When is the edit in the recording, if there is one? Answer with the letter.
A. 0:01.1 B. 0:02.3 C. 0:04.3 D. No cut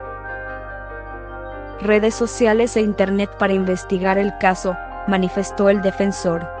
A